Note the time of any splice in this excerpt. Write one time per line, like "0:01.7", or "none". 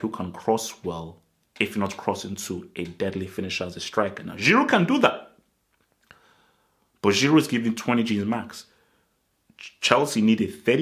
none